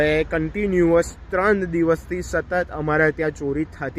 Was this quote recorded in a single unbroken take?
yes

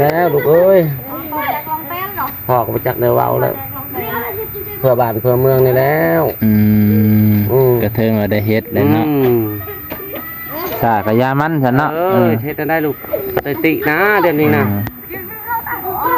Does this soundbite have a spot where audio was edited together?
no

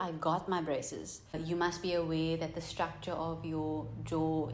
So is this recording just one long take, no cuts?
no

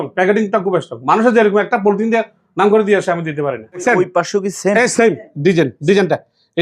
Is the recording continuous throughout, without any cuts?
no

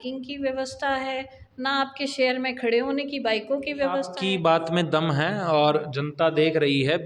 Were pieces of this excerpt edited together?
yes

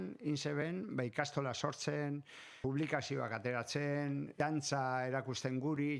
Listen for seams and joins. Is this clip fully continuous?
no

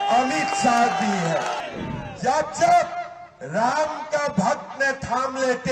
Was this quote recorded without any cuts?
no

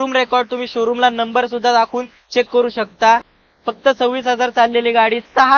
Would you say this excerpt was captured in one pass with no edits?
yes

